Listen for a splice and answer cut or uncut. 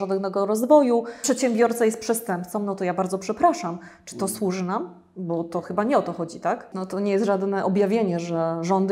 cut